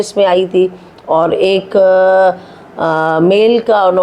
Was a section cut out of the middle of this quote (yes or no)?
no